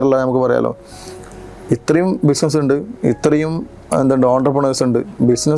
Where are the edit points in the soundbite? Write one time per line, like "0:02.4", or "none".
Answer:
none